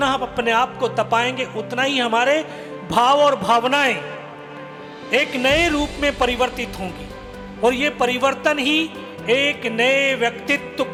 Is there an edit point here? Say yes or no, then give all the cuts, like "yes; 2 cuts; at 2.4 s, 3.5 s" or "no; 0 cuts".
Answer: no; 0 cuts